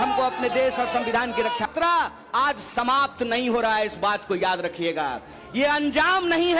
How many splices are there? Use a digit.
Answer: 1